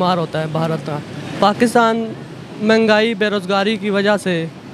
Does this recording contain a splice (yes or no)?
yes